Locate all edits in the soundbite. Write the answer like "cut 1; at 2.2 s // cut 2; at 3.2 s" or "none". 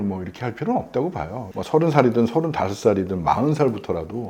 cut 1; at 1.5 s